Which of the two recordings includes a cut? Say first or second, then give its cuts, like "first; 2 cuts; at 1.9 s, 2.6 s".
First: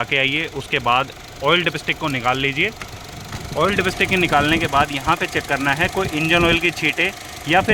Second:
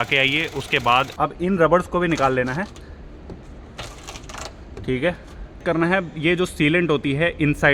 second; 2 cuts; at 1.1 s, 5.6 s